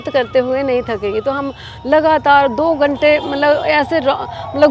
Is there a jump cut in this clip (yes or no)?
no